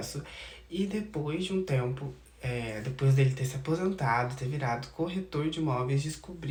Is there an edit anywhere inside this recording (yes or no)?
no